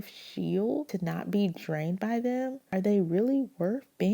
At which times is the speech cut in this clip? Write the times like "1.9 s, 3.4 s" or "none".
0.9 s, 2.6 s